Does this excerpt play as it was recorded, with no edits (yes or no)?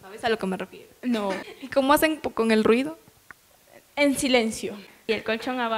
no